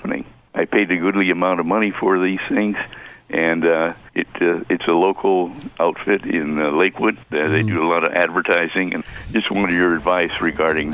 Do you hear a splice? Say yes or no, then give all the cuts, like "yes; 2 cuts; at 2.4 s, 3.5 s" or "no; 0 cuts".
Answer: yes; 2 cuts; at 7.3 s, 9.0 s